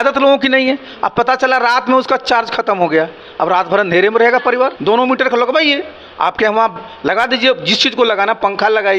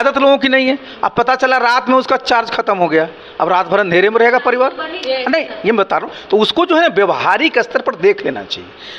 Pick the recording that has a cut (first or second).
first